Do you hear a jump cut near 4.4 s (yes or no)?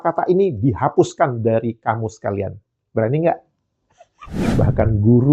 yes